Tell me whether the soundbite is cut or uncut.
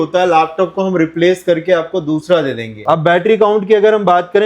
cut